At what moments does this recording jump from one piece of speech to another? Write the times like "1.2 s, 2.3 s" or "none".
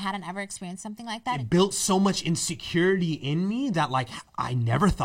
1.3 s